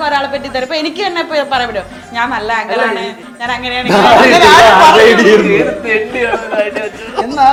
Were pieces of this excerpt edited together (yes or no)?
no